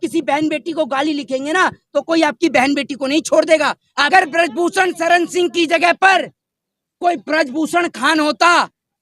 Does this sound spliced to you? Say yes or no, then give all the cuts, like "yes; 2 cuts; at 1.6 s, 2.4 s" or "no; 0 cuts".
yes; 1 cut; at 4.1 s